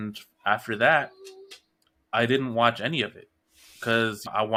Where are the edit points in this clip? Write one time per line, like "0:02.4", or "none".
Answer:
none